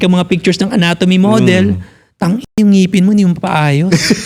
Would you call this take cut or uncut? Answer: uncut